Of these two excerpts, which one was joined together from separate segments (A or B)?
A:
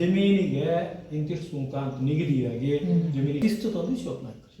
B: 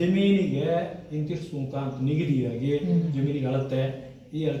A